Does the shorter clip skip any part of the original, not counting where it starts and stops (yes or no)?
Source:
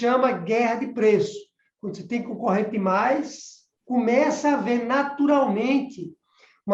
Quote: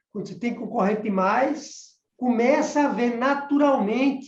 no